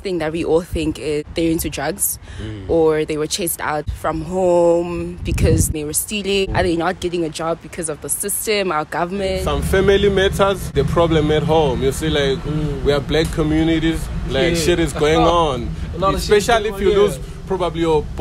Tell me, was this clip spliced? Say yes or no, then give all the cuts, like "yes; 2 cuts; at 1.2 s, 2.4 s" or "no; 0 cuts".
yes; 5 cuts; at 1.3 s, 3.9 s, 6.0 s, 9.4 s, 10.7 s